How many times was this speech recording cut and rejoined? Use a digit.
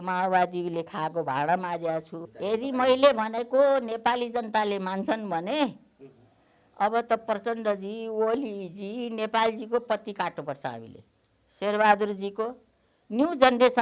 1